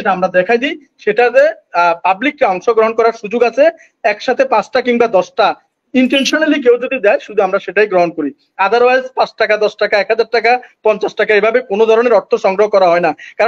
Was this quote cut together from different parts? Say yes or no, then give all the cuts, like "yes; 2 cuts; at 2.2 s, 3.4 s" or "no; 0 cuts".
no; 0 cuts